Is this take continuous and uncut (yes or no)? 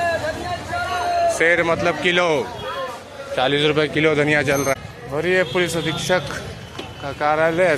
no